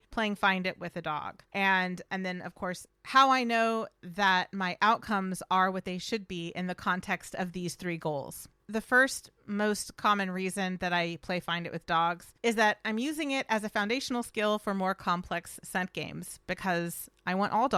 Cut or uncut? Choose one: uncut